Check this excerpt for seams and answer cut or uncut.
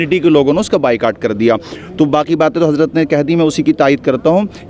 uncut